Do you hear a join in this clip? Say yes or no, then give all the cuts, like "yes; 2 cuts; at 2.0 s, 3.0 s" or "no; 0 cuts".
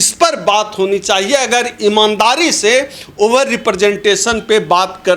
no; 0 cuts